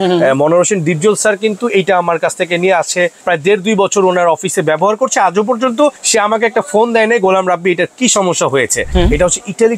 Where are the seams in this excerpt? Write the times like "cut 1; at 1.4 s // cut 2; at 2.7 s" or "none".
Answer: cut 1; at 3.2 s // cut 2; at 6.0 s // cut 3; at 8.8 s